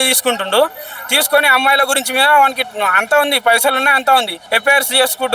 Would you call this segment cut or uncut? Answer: cut